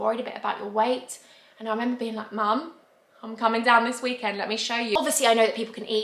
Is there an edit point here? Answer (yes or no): no